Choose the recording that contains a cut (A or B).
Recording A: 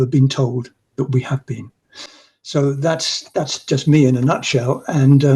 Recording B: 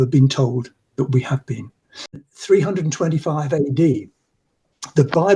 B